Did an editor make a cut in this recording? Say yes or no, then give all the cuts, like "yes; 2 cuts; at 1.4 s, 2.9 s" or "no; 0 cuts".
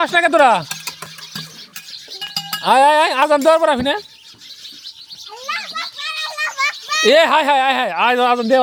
no; 0 cuts